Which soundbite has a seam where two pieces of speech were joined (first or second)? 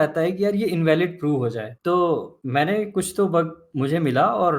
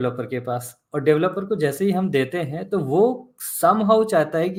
first